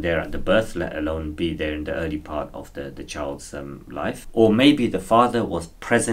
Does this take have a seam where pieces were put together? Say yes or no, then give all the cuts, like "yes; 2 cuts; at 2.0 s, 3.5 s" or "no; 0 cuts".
no; 0 cuts